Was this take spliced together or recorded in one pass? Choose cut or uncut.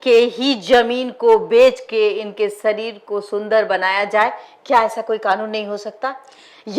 uncut